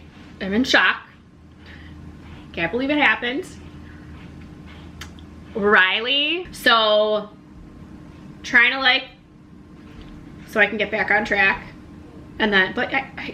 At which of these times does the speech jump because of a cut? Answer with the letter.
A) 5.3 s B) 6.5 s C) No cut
B